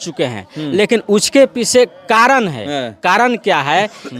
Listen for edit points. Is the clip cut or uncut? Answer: uncut